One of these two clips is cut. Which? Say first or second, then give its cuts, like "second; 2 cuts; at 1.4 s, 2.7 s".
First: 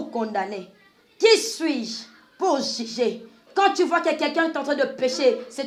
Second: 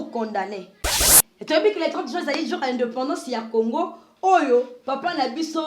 second; 1 cut; at 1.1 s